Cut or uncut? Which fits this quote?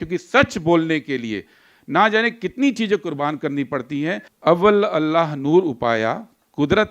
cut